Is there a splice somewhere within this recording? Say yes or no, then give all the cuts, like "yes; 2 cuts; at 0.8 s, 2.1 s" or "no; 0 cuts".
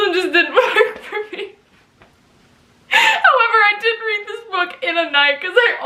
no; 0 cuts